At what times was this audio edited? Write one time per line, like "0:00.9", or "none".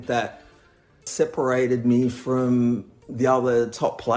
0:01.0

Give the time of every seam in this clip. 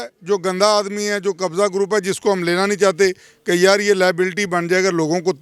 none

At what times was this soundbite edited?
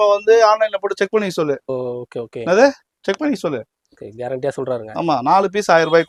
none

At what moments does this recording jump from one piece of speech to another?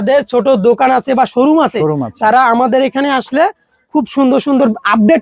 none

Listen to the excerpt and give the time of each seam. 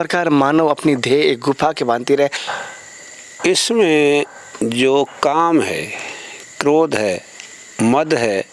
0:02.4

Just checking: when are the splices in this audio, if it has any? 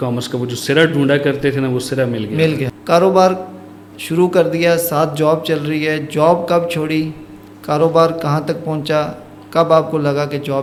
none

